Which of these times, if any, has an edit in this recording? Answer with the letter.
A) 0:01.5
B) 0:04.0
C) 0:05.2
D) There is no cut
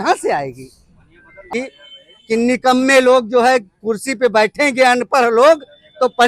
A